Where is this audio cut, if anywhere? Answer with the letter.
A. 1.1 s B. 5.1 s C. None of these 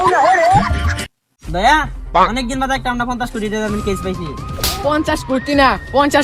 A